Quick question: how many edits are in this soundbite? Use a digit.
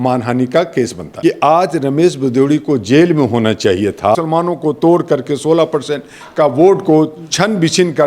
2